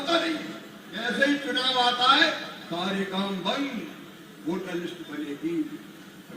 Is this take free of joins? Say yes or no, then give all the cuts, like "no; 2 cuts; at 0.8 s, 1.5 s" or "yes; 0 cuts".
no; 1 cut; at 1.0 s